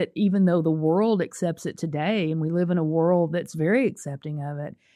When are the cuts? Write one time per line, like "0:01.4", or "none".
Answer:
none